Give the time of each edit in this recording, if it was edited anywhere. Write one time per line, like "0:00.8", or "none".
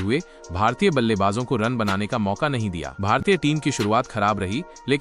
0:02.9